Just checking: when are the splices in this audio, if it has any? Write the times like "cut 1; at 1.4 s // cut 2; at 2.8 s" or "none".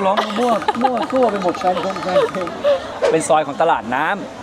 none